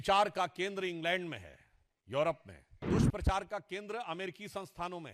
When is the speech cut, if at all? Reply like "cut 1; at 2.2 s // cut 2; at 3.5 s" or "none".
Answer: cut 1; at 2.9 s